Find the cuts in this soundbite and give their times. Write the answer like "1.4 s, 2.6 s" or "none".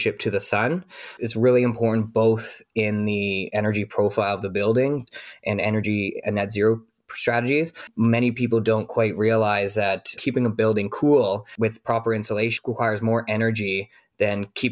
3.5 s, 5.1 s, 7.9 s, 10.2 s, 12.5 s